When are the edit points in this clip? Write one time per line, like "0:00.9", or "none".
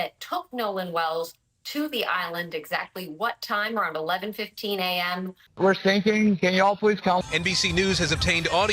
0:05.4